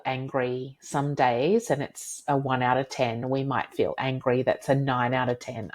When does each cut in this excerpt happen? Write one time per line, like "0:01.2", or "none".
none